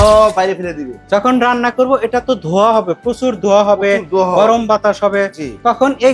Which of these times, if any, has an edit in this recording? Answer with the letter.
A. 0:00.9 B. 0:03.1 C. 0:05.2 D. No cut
A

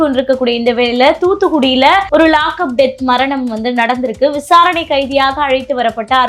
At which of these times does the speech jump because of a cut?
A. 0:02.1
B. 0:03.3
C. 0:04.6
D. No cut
A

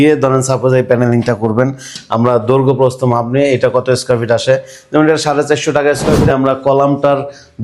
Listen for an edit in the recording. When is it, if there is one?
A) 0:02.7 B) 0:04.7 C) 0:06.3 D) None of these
C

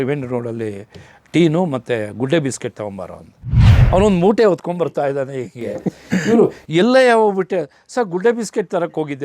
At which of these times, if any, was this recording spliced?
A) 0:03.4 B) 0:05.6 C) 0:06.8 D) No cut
A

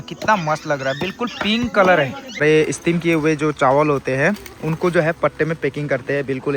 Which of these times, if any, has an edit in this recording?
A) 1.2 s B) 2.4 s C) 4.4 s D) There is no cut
B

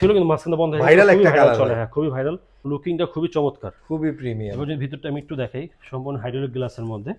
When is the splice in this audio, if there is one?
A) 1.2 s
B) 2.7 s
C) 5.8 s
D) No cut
B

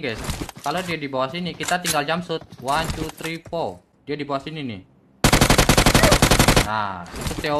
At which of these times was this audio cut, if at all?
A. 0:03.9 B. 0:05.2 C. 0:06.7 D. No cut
A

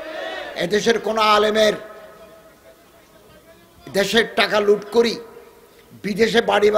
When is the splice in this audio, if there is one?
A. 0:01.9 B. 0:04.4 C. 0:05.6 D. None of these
D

